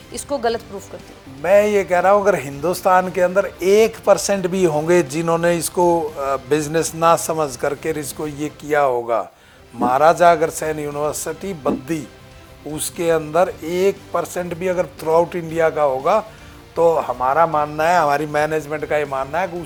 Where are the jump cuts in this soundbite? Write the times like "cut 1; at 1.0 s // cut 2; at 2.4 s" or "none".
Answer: none